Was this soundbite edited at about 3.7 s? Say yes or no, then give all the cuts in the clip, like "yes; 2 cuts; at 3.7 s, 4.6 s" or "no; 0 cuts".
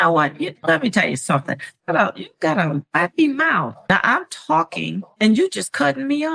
yes; 1 cut; at 3.7 s